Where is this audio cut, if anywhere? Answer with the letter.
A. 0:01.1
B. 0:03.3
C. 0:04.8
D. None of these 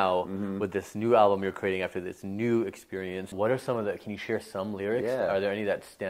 B